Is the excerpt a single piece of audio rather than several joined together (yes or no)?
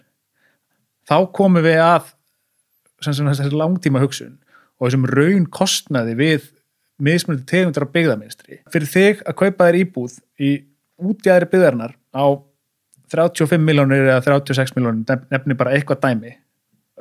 no